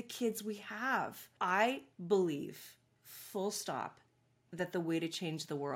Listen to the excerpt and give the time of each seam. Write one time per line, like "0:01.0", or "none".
0:01.3